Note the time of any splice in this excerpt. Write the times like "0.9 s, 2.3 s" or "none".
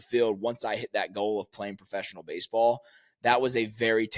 none